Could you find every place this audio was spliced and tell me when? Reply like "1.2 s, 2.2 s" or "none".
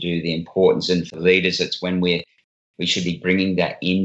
none